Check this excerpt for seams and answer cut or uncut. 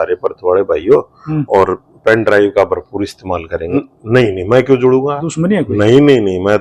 cut